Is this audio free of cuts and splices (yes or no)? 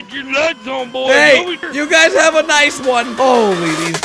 no